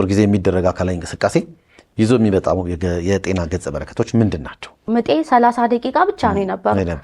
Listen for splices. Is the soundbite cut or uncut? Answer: cut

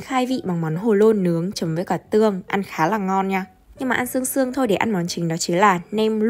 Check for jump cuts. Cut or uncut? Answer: uncut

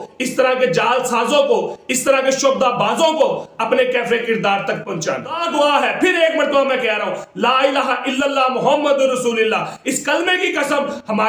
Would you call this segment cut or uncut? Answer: cut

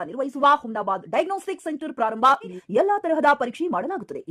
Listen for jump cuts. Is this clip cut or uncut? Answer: cut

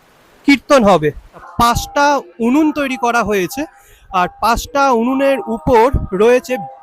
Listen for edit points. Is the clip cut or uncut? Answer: cut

